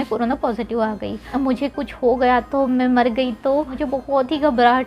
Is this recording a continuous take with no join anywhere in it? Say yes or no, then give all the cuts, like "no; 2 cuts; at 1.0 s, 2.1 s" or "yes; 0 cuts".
no; 2 cuts; at 1.2 s, 3.8 s